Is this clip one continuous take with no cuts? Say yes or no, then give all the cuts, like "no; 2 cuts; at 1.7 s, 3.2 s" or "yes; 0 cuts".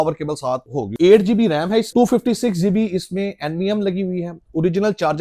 no; 2 cuts; at 0.9 s, 1.9 s